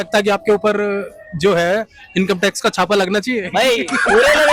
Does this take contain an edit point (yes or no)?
no